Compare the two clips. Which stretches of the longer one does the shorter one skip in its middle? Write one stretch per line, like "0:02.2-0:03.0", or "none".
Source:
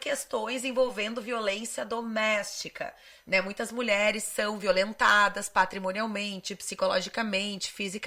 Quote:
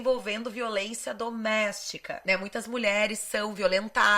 0:02.8-0:03.1